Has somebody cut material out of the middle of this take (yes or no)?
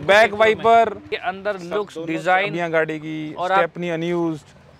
yes